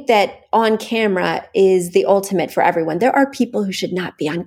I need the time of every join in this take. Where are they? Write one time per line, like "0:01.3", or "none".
none